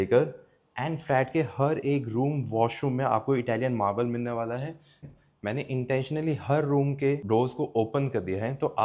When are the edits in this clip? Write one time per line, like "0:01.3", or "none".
0:05.0
0:07.2